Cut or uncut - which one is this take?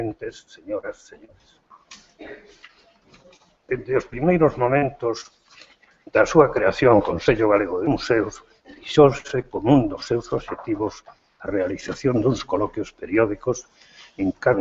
cut